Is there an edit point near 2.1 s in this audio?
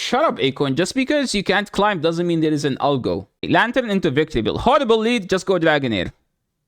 no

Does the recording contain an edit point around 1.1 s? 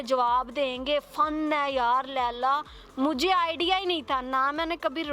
no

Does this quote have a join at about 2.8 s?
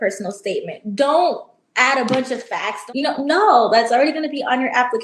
yes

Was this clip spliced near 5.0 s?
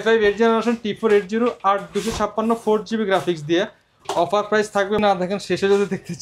yes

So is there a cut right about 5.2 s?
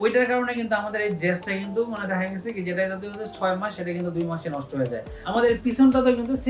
yes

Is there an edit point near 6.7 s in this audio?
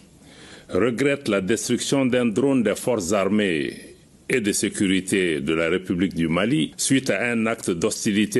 yes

